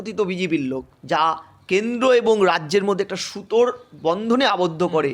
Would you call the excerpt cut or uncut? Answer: cut